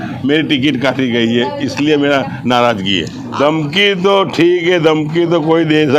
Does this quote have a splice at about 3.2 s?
yes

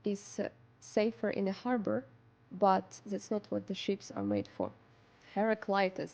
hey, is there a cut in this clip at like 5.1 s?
yes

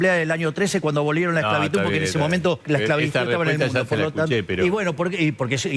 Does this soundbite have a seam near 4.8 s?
no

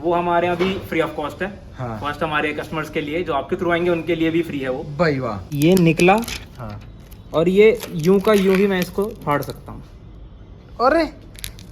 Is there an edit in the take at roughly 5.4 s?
yes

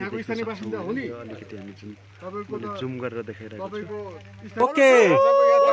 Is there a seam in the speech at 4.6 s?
yes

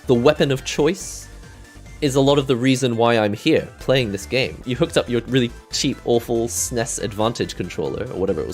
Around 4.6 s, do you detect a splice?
yes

